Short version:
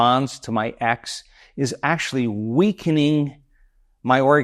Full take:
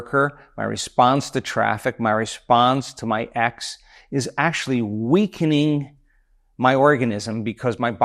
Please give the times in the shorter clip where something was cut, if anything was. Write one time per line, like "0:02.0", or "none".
none